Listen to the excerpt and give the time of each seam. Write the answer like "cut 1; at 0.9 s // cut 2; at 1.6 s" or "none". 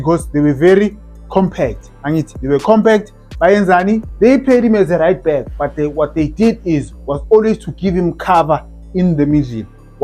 cut 1; at 4.1 s